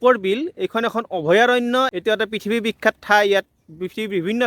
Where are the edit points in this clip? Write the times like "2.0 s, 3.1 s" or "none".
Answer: 1.9 s